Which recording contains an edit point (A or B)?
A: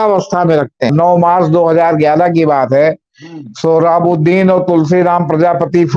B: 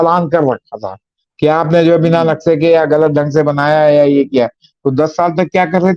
A